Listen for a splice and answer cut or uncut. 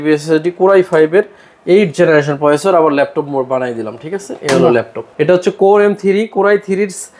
cut